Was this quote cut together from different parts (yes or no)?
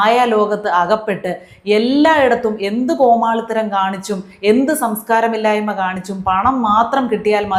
no